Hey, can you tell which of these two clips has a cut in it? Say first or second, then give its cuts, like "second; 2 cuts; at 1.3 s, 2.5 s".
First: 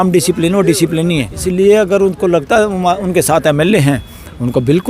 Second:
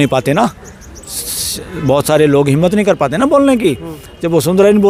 first; 1 cut; at 1.4 s